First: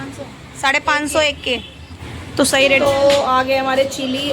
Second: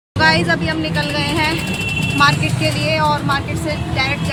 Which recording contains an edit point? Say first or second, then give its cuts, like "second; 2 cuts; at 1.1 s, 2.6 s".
first; 1 cut; at 2.8 s